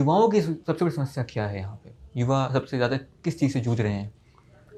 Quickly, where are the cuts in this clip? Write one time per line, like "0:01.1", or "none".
none